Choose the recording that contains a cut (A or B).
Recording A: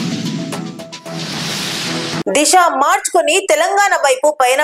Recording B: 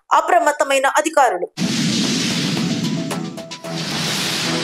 A